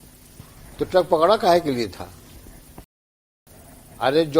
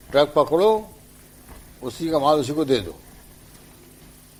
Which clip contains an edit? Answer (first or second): first